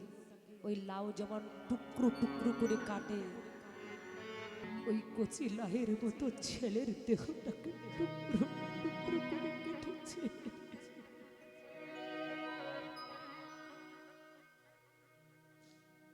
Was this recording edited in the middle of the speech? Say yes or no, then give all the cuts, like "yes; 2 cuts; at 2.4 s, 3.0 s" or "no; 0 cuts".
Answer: yes; 1 cut; at 4.7 s